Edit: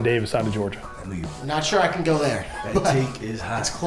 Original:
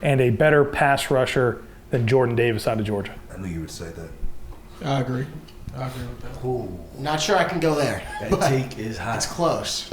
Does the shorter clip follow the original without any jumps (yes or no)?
no